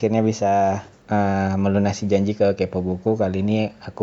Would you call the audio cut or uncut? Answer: cut